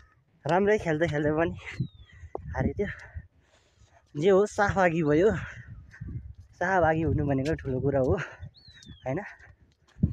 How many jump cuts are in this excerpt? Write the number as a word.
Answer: zero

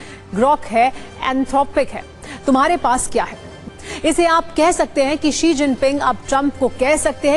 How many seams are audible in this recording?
one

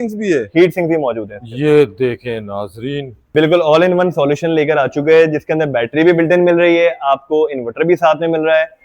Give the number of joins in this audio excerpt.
one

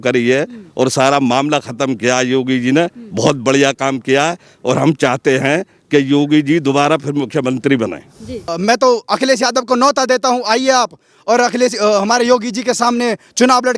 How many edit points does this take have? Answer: one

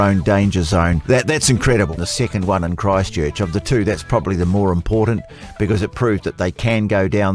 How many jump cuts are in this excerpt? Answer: two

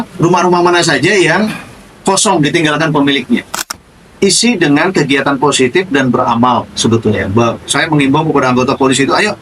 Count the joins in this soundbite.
one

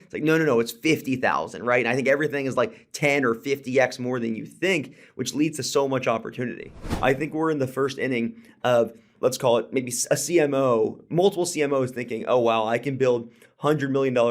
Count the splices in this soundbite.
two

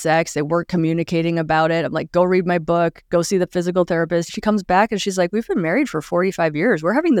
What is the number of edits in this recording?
one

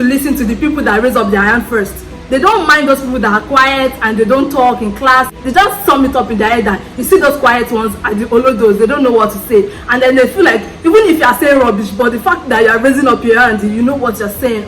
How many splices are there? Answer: one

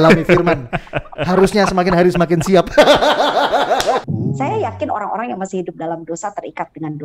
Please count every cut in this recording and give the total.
one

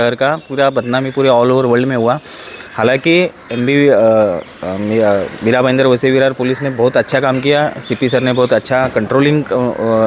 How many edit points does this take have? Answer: zero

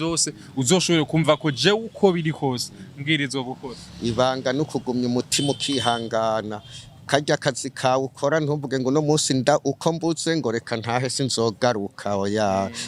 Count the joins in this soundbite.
zero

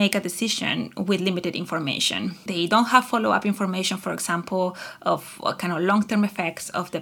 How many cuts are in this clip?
one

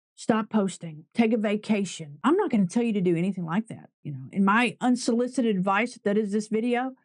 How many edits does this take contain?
one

